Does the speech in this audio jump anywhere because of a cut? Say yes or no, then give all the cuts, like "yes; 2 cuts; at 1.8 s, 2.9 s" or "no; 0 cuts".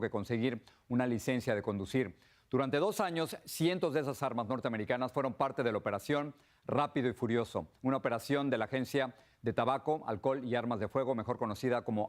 yes; 1 cut; at 1.6 s